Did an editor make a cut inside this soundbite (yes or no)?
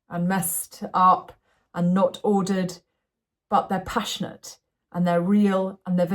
no